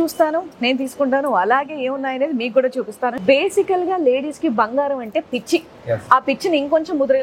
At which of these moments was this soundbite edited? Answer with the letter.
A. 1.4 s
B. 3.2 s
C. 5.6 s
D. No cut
B